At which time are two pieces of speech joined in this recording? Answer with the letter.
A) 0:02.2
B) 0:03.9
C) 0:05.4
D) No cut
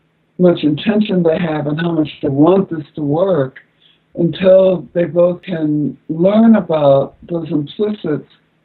C